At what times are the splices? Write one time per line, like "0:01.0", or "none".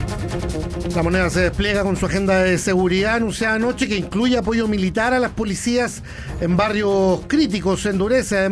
0:00.9